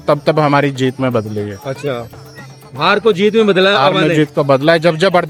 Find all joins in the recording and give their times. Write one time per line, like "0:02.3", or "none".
none